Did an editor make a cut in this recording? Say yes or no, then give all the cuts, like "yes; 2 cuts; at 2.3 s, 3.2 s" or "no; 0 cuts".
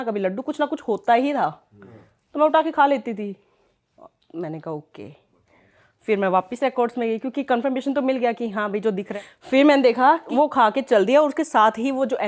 yes; 2 cuts; at 9.1 s, 10.3 s